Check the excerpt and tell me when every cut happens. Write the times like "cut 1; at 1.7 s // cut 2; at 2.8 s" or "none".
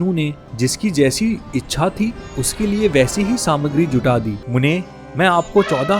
cut 1; at 4.4 s